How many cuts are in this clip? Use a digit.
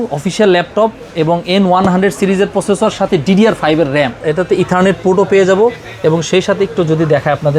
1